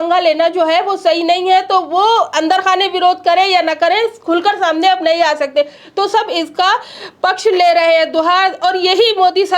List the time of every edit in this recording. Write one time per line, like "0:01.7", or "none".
none